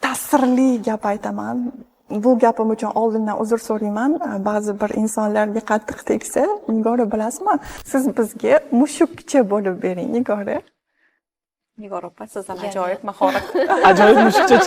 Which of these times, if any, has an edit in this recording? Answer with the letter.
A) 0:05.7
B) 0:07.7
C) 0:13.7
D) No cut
B